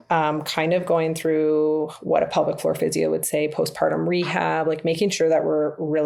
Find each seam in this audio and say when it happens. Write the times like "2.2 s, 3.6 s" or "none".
none

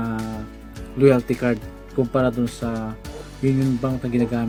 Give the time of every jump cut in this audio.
none

